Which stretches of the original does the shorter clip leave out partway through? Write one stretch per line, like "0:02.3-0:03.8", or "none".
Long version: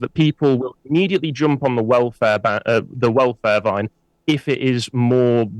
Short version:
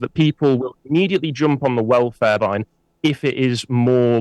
0:02.4-0:03.6